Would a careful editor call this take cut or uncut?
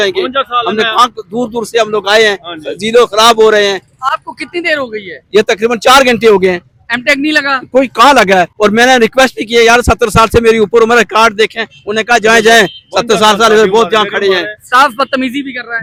uncut